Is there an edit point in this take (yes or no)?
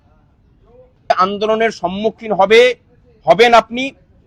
yes